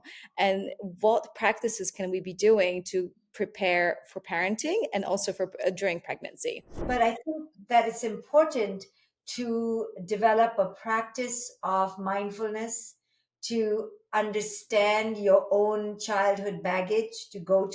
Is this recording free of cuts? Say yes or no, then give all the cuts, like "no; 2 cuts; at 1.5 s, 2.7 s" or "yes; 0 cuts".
no; 1 cut; at 6.8 s